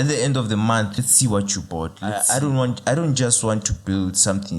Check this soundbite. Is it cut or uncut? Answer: cut